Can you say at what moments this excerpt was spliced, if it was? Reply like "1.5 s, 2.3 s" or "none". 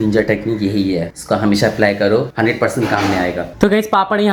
none